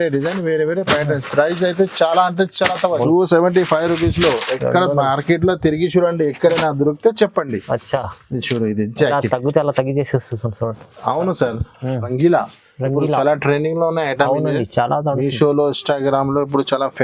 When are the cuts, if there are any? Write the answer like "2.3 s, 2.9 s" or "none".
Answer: 3.0 s, 12.1 s